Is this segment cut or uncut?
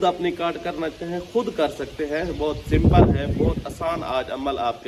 uncut